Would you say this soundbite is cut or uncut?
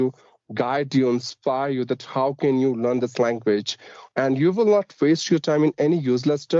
uncut